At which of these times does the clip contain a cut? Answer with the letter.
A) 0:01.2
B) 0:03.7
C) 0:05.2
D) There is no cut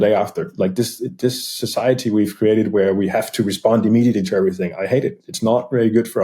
C